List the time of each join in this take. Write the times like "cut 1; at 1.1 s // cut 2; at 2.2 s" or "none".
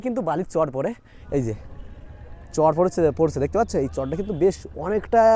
cut 1; at 1.1 s

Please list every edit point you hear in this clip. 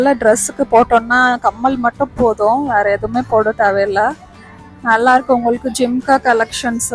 none

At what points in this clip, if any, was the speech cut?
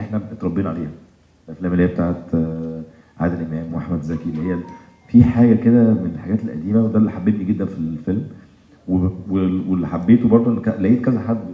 none

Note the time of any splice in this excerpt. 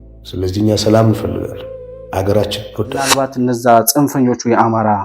cut 1; at 3.3 s

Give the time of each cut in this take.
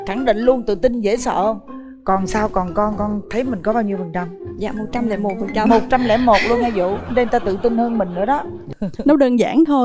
cut 1; at 8.7 s

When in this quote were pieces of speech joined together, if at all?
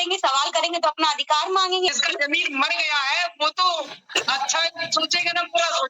cut 1; at 1.9 s

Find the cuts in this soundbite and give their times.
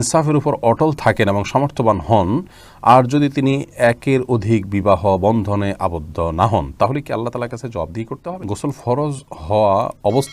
cut 1; at 8.4 s

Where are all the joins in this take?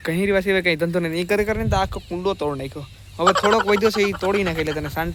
none

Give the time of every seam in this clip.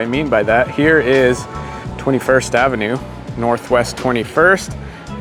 none

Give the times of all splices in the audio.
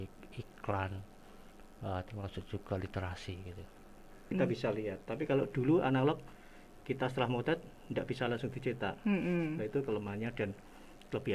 cut 1; at 4.3 s

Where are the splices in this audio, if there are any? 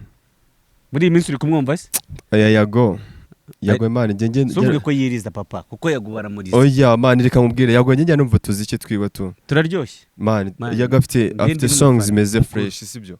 cut 1; at 2.2 s

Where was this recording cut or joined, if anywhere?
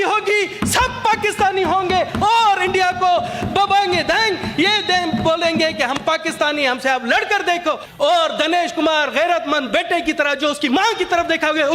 cut 1; at 7.9 s

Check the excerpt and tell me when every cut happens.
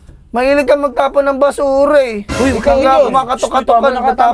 none

